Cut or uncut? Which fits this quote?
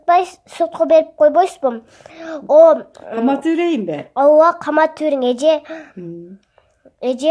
uncut